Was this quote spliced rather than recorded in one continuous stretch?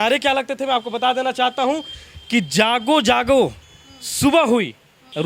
no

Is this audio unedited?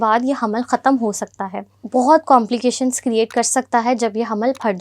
no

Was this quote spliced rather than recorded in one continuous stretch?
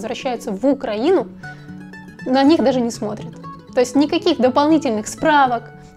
no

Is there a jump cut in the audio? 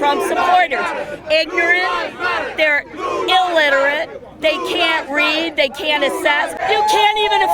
yes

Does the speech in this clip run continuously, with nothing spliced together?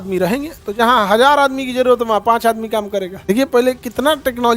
no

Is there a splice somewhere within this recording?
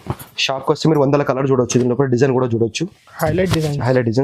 no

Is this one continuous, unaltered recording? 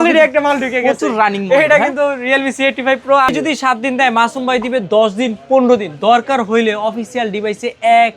no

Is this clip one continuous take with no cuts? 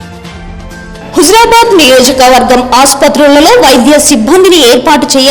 no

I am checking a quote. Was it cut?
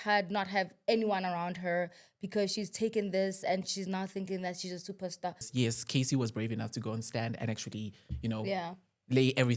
yes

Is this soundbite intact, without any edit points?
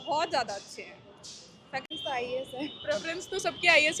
no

